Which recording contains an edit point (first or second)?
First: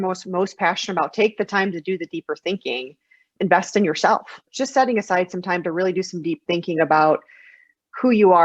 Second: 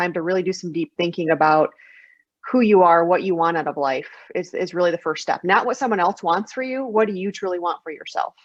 first